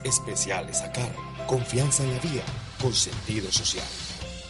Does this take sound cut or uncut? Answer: uncut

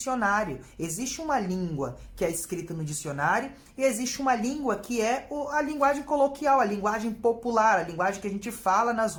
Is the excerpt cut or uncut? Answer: uncut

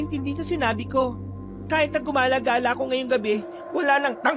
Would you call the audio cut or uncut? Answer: uncut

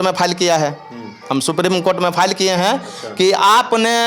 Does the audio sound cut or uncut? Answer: uncut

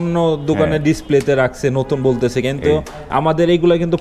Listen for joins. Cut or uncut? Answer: uncut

